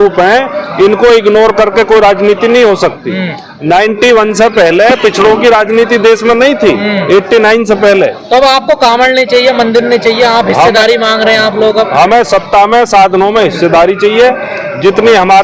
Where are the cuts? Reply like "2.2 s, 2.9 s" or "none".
none